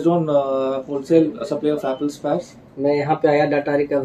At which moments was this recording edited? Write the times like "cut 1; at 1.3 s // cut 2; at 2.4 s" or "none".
cut 1; at 2.6 s